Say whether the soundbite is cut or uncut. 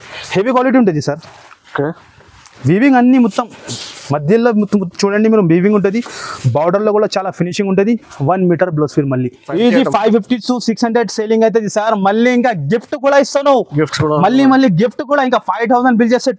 cut